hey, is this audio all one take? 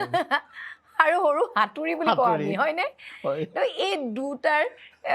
yes; 0 cuts

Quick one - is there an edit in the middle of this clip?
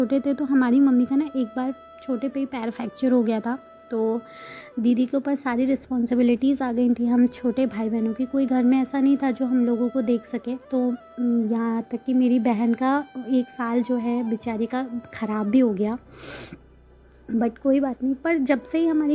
no; 0 cuts

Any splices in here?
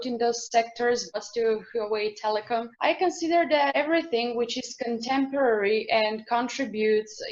no; 0 cuts

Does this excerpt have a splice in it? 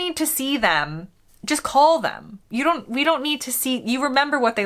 no; 0 cuts

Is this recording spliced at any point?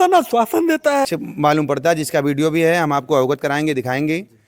yes; 1 cut; at 1.1 s

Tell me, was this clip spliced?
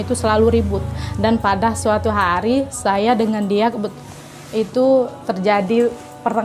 no; 0 cuts

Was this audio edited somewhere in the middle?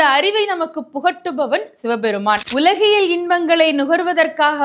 yes; 1 cut; at 2.4 s

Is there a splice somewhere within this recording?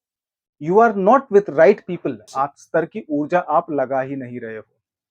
yes; 1 cut; at 2.6 s

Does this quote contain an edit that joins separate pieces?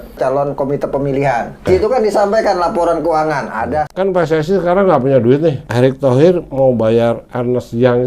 yes; 3 cuts; at 1.7 s, 3.9 s, 5.6 s

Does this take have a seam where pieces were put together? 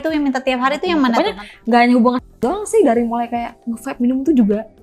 yes; 1 cut; at 1.1 s

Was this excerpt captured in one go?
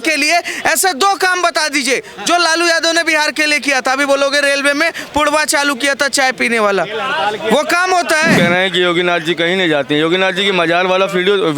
no; 1 cut; at 8.3 s

